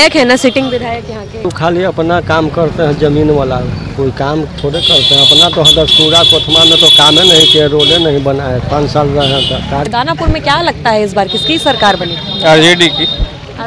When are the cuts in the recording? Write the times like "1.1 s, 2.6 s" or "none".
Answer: 1.5 s, 9.9 s